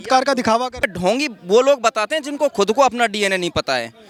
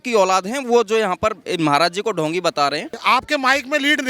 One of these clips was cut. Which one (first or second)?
second